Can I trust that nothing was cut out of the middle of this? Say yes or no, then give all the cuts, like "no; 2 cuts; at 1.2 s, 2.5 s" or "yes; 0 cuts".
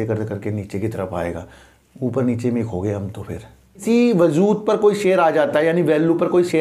no; 1 cut; at 3.8 s